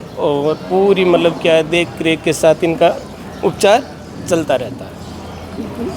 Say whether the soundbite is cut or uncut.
uncut